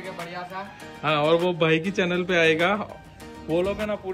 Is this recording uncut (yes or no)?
yes